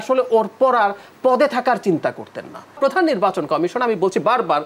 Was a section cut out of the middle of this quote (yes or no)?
yes